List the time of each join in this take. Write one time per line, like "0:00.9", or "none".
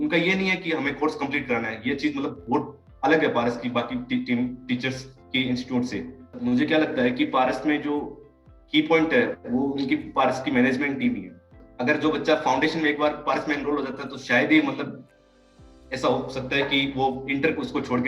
0:06.4
0:11.6